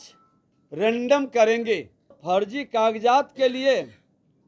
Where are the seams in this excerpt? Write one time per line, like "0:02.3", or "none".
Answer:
0:02.2

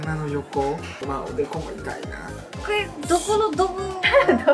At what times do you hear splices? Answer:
0:01.0
0:02.6

